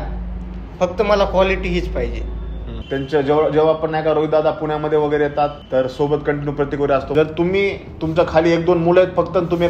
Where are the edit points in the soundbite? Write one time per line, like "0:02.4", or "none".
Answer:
0:02.8
0:07.1